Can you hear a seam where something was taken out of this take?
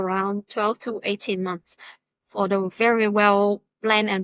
no; 0 cuts

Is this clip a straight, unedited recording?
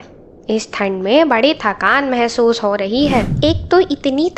no; 1 cut; at 3.3 s

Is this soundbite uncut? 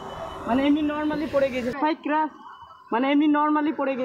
no; 1 cut; at 1.7 s

